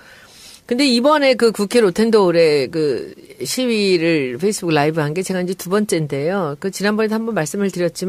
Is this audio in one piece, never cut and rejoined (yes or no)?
no